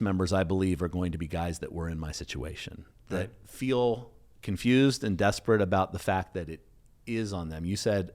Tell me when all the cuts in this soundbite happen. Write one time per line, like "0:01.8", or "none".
none